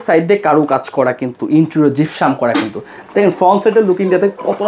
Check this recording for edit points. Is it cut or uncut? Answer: uncut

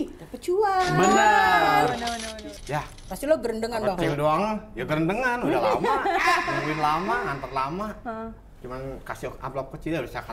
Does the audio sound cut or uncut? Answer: cut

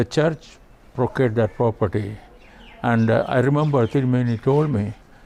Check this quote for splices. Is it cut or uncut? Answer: uncut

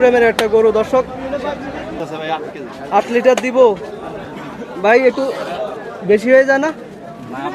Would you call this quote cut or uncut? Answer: cut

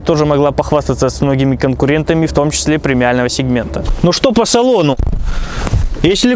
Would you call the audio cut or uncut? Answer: uncut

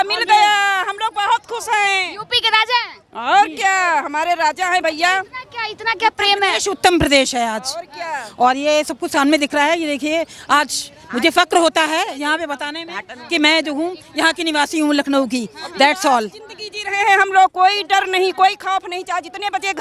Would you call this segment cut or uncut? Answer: uncut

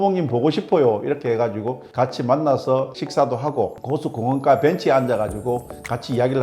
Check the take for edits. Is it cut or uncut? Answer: cut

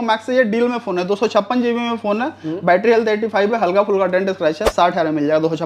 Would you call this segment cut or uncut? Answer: uncut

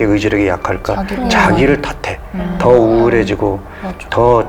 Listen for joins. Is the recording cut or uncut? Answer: uncut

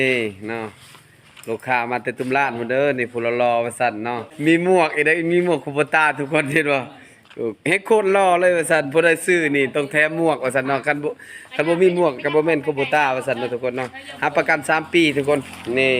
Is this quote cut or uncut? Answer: cut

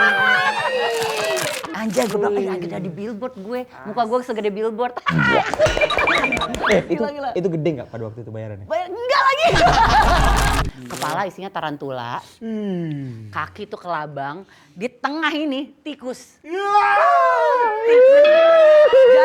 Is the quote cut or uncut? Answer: cut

